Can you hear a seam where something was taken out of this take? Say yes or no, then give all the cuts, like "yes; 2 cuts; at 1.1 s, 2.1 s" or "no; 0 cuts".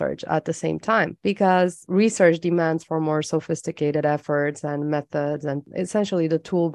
no; 0 cuts